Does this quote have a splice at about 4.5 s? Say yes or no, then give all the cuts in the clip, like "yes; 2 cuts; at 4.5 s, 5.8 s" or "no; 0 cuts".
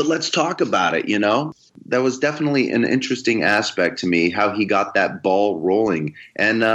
no; 1 cut; at 1.5 s